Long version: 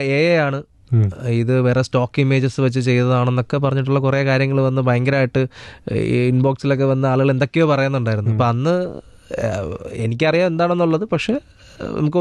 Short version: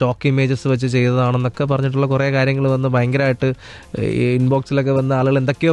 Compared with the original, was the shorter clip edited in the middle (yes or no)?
no